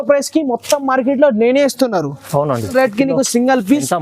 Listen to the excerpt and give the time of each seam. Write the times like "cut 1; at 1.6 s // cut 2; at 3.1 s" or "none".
cut 1; at 2.7 s